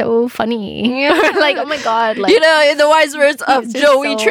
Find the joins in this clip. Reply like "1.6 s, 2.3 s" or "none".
none

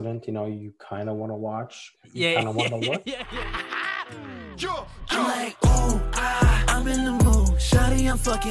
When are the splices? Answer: 3.1 s

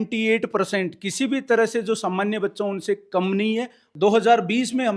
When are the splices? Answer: 3.8 s

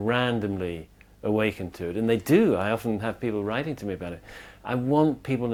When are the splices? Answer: none

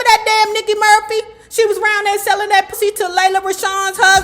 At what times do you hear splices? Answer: 2.7 s

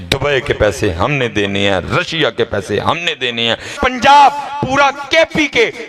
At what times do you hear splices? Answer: 3.8 s

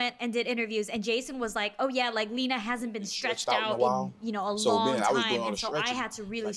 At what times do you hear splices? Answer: none

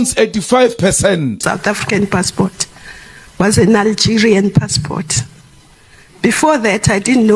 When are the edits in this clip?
1.4 s

